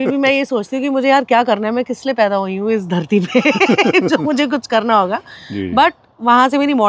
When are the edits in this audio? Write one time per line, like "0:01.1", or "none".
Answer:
none